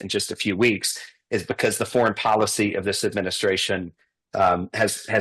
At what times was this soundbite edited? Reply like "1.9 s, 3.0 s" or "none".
none

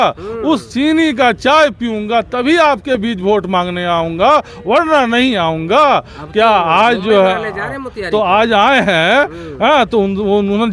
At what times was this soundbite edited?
none

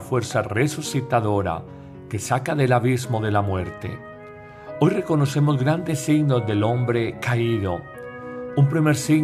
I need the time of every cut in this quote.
none

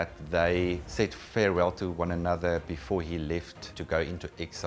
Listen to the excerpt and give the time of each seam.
0.8 s, 3.7 s

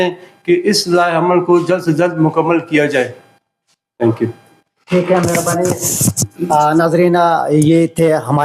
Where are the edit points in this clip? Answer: none

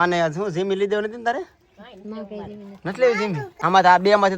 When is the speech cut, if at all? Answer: 3.5 s

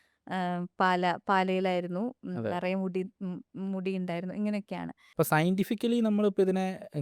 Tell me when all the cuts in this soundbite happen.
5.0 s

